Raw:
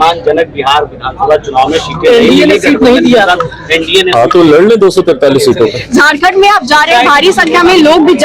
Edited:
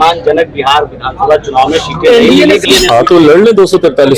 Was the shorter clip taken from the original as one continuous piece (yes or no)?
no